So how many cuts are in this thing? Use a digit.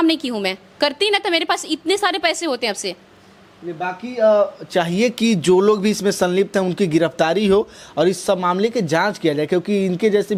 0